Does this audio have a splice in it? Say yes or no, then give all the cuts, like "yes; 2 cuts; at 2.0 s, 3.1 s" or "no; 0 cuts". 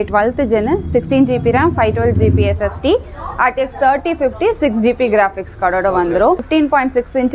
yes; 1 cut; at 6.5 s